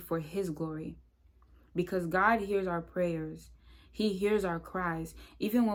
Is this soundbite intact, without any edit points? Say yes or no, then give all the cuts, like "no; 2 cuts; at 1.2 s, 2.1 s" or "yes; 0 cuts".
yes; 0 cuts